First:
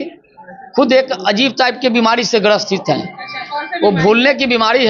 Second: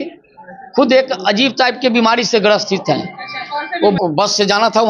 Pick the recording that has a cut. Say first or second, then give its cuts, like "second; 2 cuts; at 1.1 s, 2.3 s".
second; 1 cut; at 4.0 s